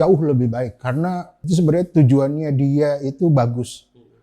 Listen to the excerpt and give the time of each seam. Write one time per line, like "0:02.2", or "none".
0:01.3